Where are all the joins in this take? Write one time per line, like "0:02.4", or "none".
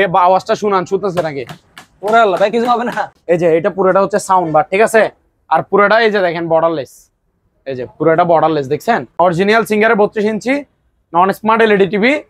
0:03.2
0:09.2